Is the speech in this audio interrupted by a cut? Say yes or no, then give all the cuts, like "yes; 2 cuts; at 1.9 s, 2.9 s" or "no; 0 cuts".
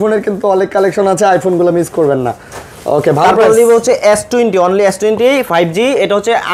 no; 0 cuts